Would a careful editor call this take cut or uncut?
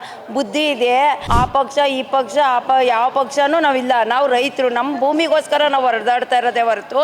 cut